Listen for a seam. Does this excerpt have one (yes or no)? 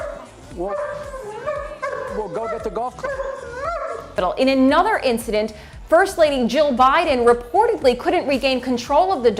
no